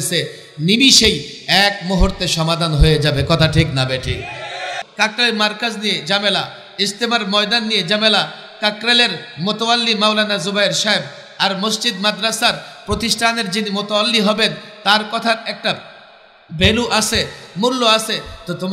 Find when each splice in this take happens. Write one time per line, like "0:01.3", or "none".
0:04.8